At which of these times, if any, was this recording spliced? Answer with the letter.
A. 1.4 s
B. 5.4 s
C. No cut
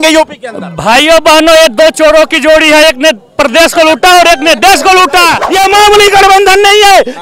B